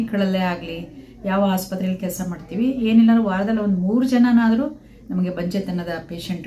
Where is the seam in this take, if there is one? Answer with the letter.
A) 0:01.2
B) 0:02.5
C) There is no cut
C